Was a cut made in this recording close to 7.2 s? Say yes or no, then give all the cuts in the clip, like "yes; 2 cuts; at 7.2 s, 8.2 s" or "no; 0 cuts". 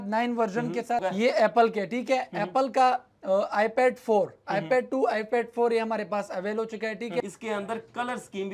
yes; 2 cuts; at 1.0 s, 7.2 s